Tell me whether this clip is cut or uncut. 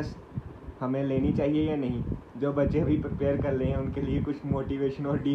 uncut